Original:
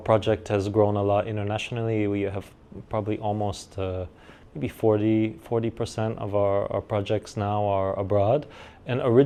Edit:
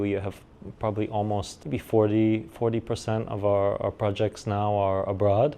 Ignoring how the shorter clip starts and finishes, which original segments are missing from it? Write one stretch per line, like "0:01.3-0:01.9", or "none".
0:03.6-0:04.4